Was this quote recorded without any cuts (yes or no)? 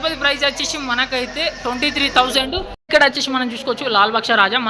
no